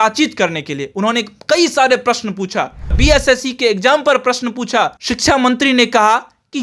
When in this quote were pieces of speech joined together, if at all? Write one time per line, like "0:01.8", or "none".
0:02.9
0:05.0